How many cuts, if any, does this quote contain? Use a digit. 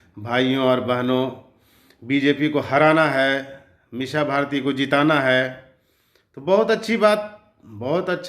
0